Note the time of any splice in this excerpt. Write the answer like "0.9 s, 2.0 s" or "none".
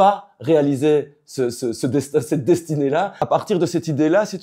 3.2 s

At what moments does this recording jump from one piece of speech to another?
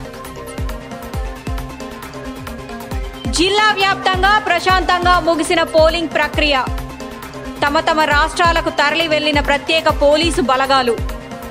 3.2 s

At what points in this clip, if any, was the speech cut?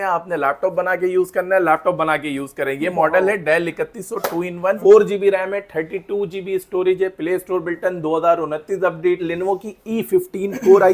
9.2 s

